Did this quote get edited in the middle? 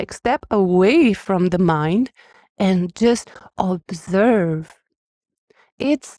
no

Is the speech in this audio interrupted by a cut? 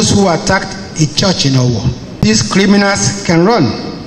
yes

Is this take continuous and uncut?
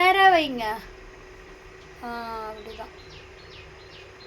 yes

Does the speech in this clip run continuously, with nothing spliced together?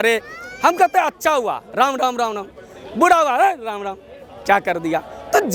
yes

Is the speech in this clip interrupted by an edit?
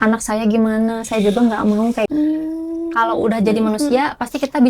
yes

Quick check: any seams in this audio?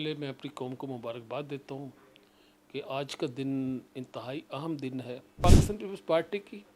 yes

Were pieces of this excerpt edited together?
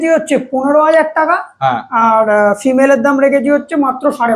no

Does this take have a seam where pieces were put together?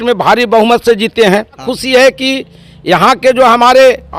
yes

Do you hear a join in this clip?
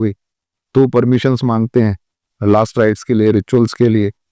no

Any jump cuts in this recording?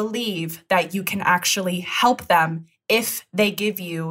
no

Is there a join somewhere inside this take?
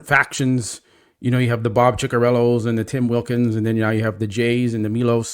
no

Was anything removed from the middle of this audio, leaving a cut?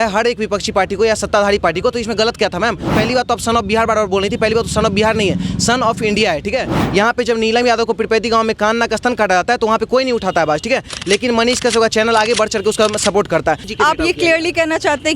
yes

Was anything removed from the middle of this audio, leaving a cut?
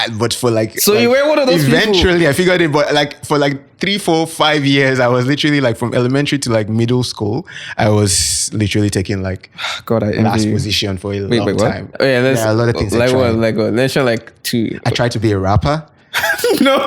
yes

